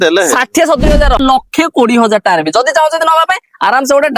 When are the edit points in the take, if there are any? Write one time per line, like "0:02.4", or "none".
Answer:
0:01.2